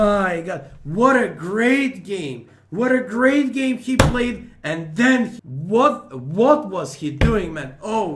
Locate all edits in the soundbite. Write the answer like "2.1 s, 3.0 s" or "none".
5.4 s